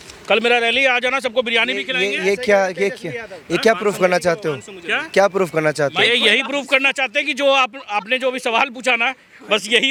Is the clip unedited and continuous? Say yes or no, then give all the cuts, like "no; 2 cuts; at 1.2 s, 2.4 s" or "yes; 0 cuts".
yes; 0 cuts